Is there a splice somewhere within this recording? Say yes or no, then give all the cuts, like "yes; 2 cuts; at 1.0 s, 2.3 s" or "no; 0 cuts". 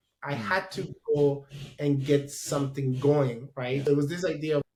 no; 0 cuts